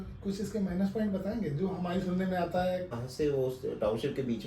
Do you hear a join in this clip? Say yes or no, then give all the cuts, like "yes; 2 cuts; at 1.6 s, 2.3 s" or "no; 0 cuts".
yes; 1 cut; at 2.9 s